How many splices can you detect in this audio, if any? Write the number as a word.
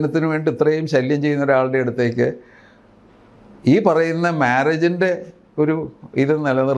zero